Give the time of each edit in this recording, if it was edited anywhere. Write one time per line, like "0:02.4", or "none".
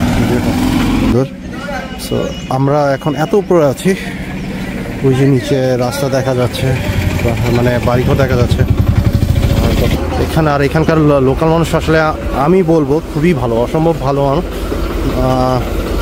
0:01.1
0:10.0